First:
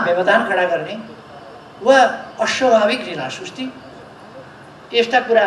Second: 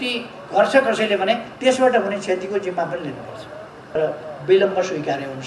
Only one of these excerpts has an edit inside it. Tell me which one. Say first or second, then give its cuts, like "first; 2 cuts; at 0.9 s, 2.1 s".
second; 1 cut; at 4.0 s